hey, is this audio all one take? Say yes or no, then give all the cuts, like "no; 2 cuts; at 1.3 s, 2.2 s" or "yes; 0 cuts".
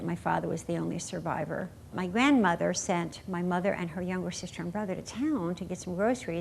no; 1 cut; at 2.0 s